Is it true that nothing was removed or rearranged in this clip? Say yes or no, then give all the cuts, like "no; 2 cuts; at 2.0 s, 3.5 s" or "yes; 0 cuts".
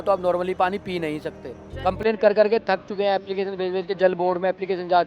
no; 1 cut; at 1.6 s